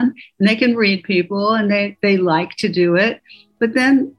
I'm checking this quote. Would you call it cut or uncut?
uncut